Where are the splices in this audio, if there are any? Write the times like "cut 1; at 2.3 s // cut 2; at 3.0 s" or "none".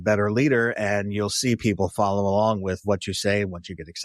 cut 1; at 2.8 s